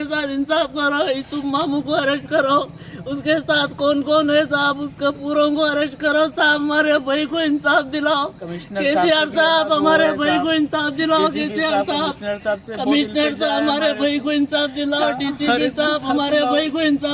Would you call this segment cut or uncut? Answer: uncut